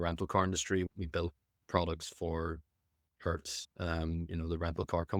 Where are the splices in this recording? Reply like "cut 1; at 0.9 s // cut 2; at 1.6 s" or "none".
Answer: none